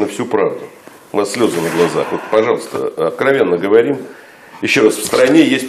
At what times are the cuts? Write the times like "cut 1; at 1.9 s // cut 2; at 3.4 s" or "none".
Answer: none